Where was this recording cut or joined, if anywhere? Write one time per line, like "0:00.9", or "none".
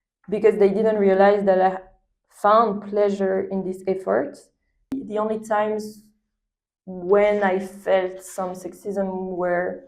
0:05.0